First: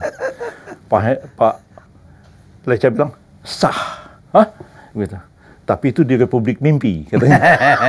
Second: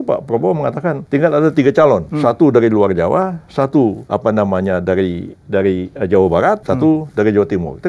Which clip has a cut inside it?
second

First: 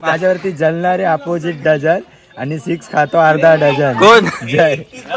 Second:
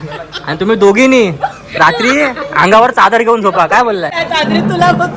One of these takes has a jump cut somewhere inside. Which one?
second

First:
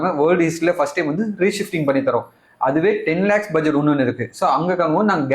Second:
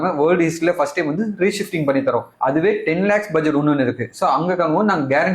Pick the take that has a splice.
second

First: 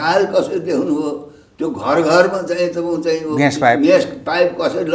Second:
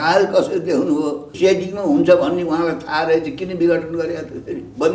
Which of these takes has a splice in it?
second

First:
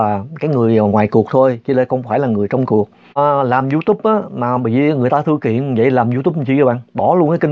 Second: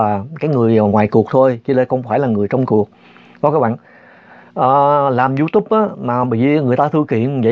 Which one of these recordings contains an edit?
first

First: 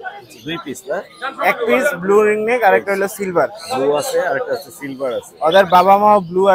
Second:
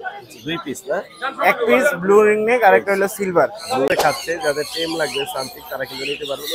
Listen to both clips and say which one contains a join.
second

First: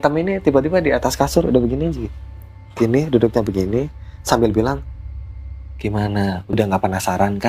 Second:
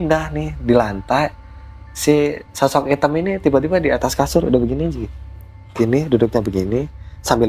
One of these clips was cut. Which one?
first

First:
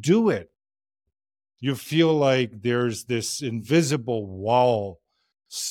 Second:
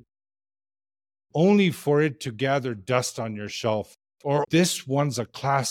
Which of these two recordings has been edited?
second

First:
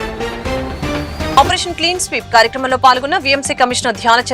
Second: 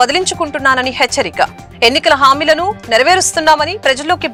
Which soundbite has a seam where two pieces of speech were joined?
first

